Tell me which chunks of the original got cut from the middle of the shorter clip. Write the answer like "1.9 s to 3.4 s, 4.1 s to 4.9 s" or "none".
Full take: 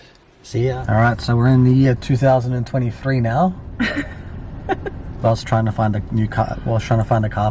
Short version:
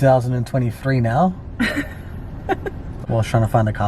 5.2 s to 6.5 s